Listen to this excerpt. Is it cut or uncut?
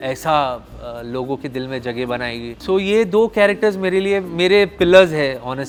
uncut